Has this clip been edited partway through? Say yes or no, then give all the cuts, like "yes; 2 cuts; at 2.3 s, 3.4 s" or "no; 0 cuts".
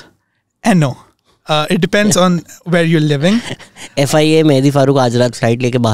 no; 0 cuts